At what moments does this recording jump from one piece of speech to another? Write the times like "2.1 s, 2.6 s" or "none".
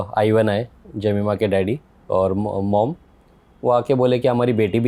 none